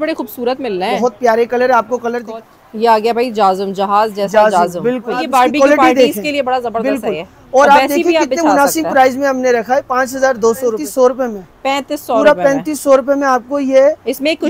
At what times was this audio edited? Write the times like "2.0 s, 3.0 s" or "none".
2.2 s, 5.2 s, 10.8 s